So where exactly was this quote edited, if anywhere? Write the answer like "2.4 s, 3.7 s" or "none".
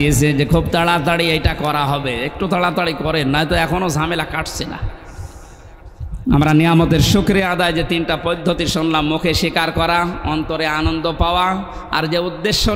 none